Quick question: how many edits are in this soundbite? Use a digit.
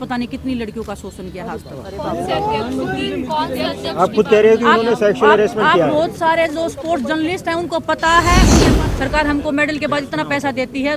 1